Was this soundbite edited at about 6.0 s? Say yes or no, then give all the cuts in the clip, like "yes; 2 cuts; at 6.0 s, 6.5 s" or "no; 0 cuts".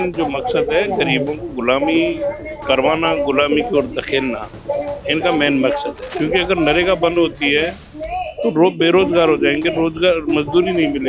yes; 1 cut; at 6.0 s